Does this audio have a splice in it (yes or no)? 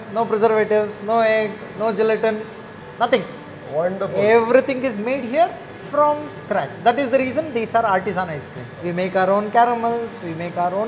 no